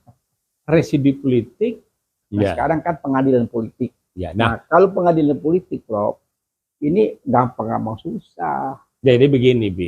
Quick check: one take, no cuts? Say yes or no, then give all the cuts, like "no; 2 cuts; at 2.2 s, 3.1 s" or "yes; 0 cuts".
no; 1 cut; at 2.2 s